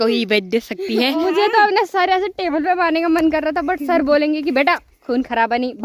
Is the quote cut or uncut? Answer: cut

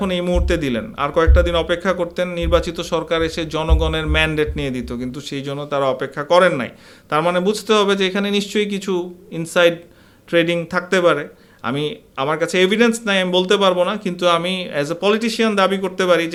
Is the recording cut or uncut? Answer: uncut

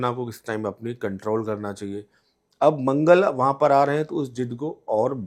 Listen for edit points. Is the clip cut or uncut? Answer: uncut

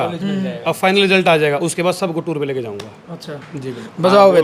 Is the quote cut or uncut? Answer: uncut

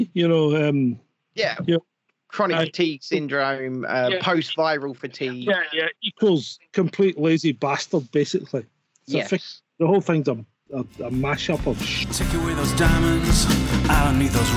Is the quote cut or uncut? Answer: cut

